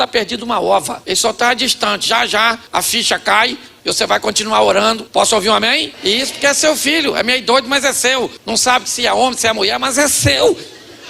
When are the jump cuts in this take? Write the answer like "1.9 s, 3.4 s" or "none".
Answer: 1.0 s, 2.6 s, 3.7 s, 5.0 s, 5.9 s, 8.4 s